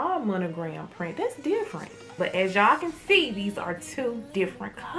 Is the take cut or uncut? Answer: cut